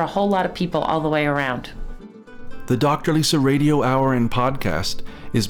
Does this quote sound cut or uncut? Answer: cut